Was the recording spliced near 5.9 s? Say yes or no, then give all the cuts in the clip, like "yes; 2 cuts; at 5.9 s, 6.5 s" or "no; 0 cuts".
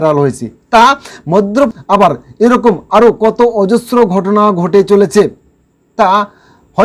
no; 1 cut; at 1.7 s